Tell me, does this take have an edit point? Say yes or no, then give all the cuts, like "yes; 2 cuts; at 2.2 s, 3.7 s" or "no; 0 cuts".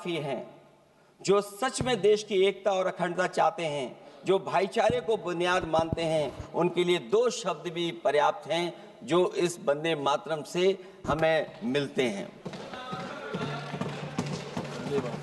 no; 0 cuts